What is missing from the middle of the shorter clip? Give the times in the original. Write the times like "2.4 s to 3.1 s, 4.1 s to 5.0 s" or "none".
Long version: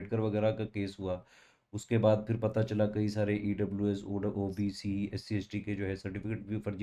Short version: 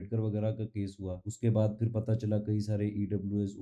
1.2 s to 1.7 s